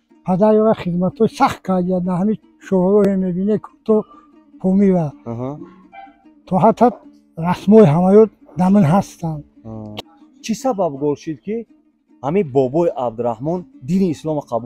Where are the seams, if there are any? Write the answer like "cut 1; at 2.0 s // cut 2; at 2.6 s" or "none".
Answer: cut 1; at 9.8 s